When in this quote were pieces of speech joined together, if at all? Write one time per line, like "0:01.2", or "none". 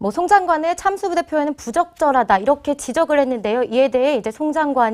0:02.9